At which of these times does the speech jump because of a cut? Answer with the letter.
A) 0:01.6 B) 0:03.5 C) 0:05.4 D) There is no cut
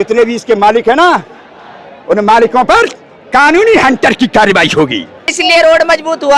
C